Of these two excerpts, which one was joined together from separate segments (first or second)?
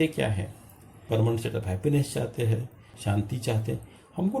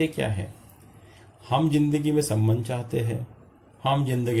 first